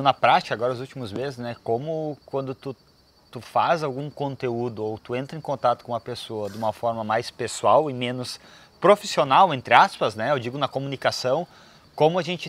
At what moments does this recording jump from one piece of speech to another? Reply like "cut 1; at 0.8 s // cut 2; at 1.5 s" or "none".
none